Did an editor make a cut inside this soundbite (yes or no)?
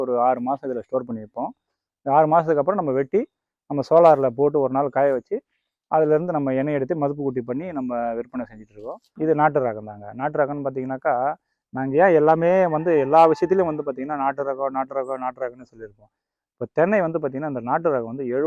yes